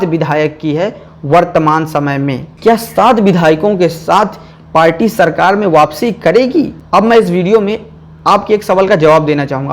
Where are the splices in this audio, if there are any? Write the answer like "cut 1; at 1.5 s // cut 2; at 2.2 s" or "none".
cut 1; at 2.5 s // cut 2; at 6.7 s